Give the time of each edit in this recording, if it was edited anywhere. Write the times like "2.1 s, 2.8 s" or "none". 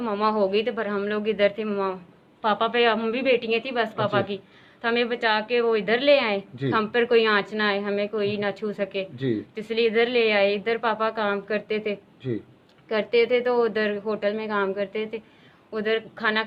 none